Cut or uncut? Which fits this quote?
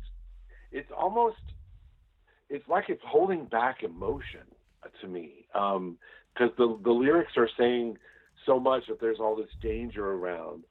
uncut